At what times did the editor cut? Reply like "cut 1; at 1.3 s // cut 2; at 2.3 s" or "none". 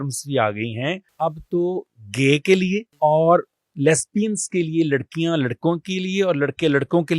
cut 1; at 1.1 s // cut 2; at 2.9 s